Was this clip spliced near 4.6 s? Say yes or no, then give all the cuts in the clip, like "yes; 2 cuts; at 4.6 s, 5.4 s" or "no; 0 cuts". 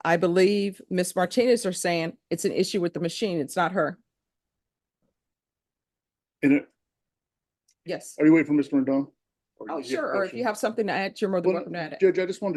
no; 0 cuts